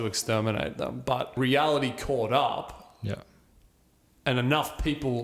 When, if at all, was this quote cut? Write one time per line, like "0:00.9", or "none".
0:01.3